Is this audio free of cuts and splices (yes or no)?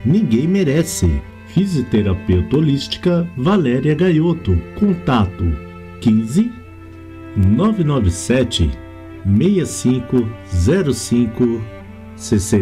yes